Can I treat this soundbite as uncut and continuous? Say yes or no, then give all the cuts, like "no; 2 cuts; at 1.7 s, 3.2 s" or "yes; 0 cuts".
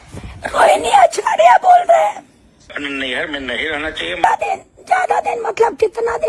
no; 2 cuts; at 2.7 s, 4.2 s